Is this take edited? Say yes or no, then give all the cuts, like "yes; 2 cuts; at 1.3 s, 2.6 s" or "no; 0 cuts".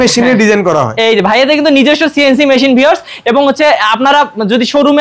no; 0 cuts